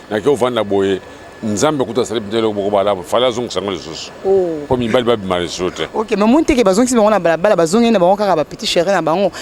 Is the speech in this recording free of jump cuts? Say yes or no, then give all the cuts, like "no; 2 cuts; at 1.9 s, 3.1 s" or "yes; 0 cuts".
yes; 0 cuts